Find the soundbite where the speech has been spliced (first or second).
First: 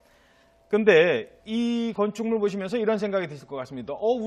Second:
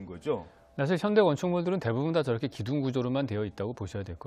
first